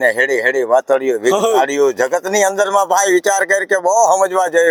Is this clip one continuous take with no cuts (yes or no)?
yes